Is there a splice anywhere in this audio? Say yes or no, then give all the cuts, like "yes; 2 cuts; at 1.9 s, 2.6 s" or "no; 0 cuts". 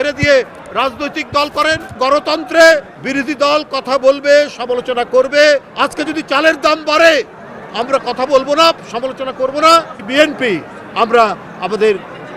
yes; 4 cuts; at 2.0 s, 3.0 s, 5.7 s, 10.0 s